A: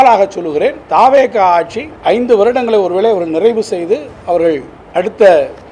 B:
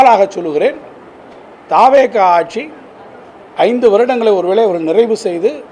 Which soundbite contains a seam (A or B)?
A